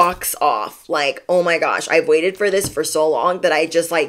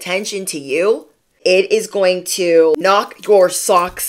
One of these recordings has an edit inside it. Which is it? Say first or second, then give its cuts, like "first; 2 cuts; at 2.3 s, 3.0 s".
second; 2 cuts; at 1.3 s, 2.8 s